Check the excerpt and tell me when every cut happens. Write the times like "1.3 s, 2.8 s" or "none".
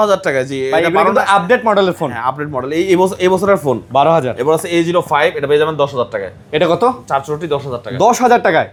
none